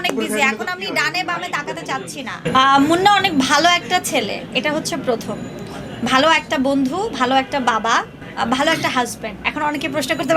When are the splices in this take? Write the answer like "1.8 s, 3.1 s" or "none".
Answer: 2.4 s, 8.2 s

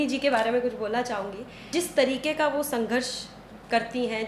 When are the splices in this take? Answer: 1.7 s

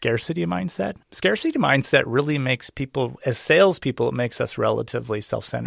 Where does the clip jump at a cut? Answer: 1.0 s

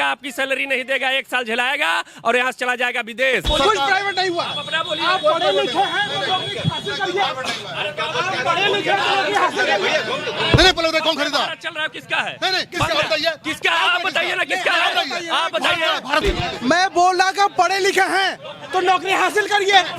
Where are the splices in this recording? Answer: 3.5 s, 10.6 s, 16.2 s

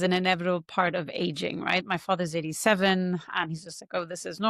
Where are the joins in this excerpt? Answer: none

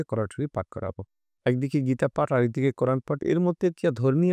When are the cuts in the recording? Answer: none

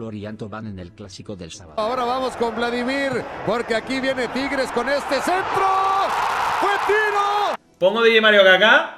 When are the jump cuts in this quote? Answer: 1.8 s, 7.6 s

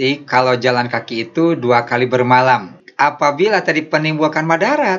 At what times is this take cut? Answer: 2.8 s

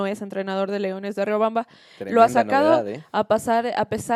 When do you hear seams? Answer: none

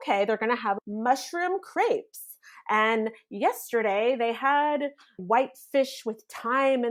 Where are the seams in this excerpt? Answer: none

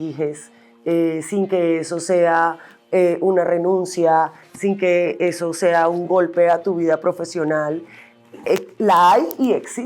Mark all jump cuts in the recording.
none

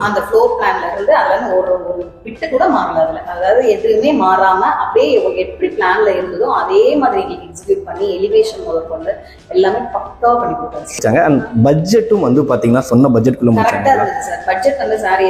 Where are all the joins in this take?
11.0 s

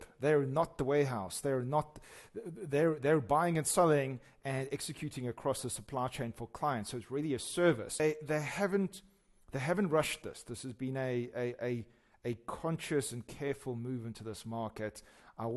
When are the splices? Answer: 8.0 s

